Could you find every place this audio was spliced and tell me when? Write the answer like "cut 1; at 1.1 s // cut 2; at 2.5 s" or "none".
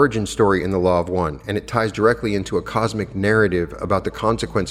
none